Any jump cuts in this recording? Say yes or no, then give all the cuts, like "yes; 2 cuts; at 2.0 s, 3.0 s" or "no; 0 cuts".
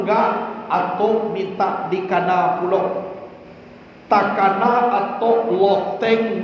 no; 0 cuts